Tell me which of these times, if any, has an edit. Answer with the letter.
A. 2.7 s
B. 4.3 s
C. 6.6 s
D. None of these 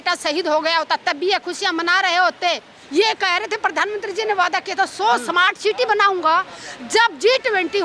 A